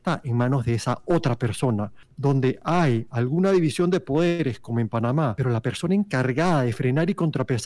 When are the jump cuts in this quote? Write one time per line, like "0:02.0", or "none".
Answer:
0:02.0
0:05.4